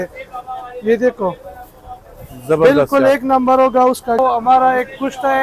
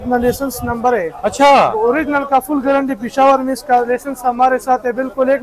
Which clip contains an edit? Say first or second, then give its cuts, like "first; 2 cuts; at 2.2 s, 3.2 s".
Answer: first; 1 cut; at 4.2 s